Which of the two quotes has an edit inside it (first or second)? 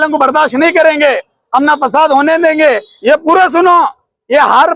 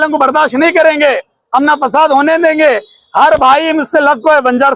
first